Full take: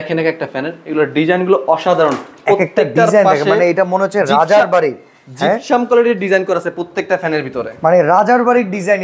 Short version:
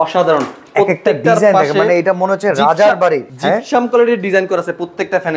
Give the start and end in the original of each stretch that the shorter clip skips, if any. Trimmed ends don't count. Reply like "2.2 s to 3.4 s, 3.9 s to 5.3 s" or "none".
5.0 s to 5.3 s